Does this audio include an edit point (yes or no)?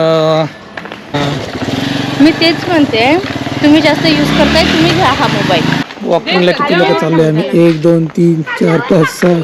yes